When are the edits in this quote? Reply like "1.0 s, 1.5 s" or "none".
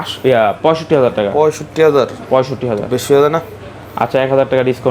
none